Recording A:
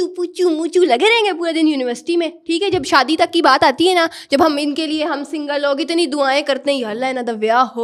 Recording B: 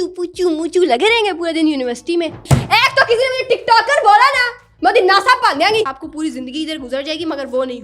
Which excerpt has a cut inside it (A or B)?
B